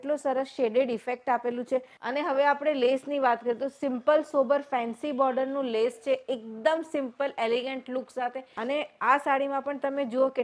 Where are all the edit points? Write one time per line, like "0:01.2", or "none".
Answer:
0:02.0
0:08.5